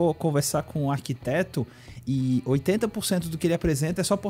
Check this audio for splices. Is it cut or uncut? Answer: uncut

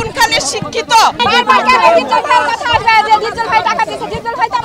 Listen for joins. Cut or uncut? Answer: cut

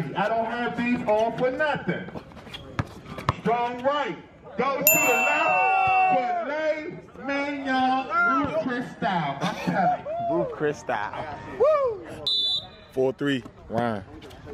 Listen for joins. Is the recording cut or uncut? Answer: uncut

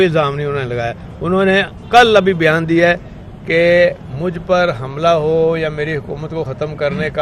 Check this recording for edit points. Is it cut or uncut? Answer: uncut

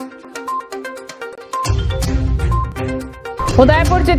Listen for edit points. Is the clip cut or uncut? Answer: uncut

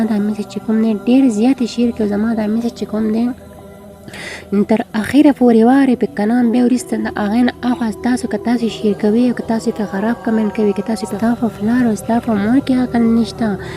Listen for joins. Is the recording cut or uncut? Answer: cut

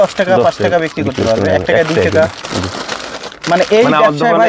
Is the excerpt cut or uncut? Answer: uncut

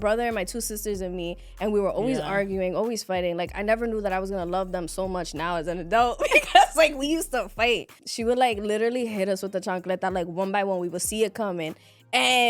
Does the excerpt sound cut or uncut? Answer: cut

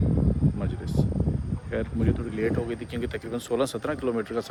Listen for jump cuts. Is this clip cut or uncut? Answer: uncut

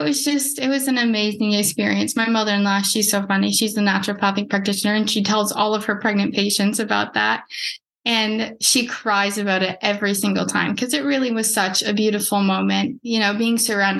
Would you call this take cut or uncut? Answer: uncut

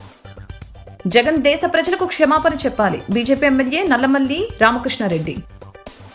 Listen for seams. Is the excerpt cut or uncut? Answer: uncut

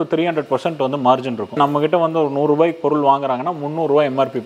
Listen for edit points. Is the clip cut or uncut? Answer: cut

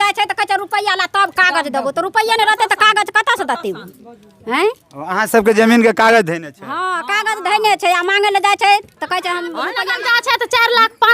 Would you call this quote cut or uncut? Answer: cut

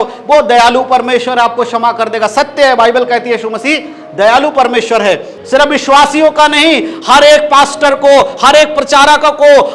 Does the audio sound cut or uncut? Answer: cut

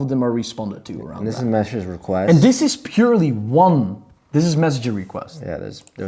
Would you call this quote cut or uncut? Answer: uncut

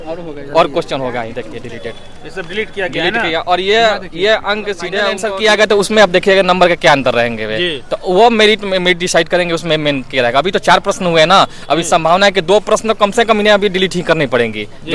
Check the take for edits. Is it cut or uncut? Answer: cut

